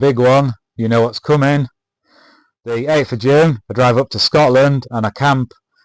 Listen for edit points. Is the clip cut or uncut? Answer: uncut